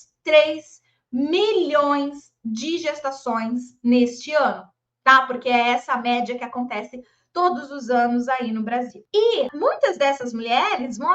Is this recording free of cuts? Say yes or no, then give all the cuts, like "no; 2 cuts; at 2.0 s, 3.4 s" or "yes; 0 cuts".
no; 2 cuts; at 9.0 s, 9.5 s